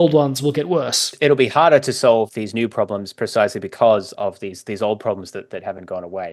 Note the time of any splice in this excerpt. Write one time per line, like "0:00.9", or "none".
0:01.1
0:02.3

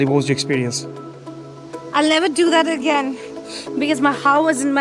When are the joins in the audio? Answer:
none

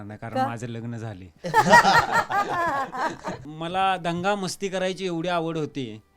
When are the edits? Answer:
0:03.5

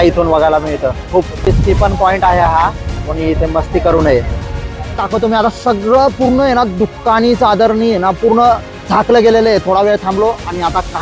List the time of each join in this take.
0:01.5
0:05.0

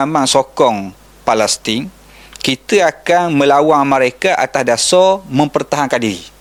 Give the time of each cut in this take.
none

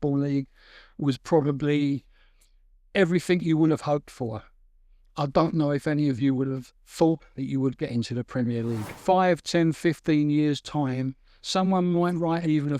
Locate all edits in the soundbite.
0:08.9

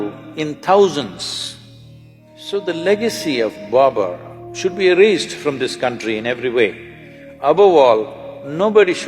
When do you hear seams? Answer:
0:02.4

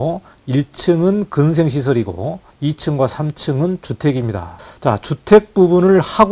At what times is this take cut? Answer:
0:02.4
0:04.5

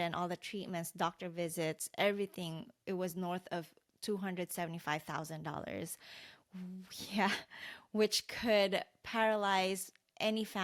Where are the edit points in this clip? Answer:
none

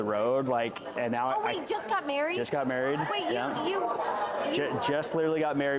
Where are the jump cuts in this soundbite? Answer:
0:00.9

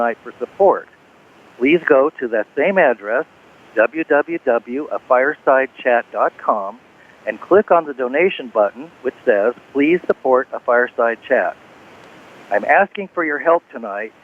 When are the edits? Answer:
0:06.6

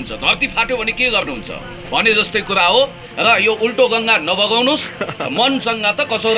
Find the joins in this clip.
none

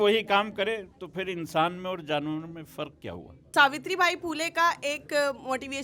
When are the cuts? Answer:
0:03.4

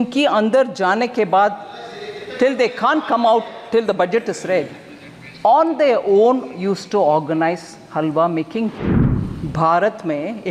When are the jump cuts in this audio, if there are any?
0:08.9

